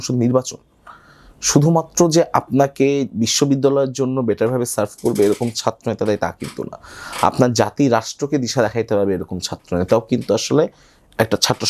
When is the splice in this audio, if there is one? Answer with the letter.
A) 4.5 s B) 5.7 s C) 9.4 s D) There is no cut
D